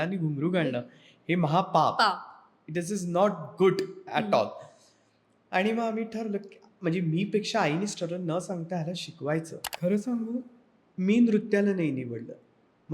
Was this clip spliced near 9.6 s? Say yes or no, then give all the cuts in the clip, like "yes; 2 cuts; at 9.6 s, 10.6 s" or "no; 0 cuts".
yes; 1 cut; at 9.6 s